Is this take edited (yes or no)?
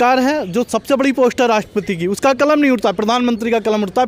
no